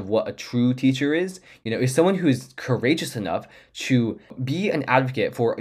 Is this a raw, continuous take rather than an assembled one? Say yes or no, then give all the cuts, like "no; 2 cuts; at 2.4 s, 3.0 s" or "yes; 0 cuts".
no; 1 cut; at 4.4 s